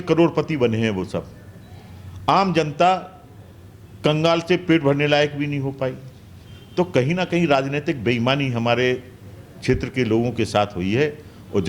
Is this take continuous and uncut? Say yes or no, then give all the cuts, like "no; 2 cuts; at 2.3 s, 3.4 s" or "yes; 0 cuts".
yes; 0 cuts